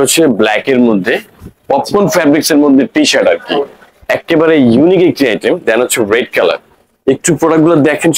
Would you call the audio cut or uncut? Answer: uncut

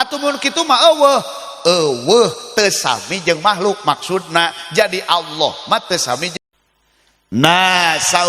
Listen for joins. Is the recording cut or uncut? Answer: cut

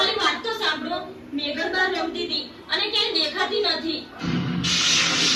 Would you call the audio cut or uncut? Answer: uncut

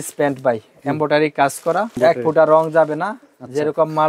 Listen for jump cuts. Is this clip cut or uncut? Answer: cut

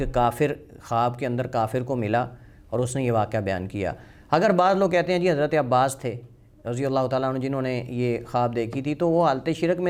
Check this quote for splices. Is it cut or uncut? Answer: uncut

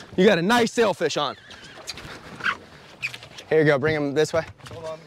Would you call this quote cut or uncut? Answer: cut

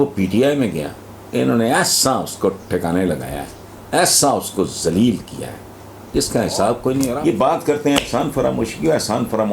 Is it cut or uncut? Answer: cut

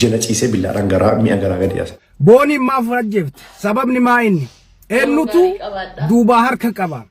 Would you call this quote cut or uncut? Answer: cut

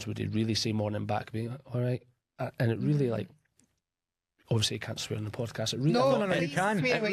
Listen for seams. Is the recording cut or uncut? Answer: uncut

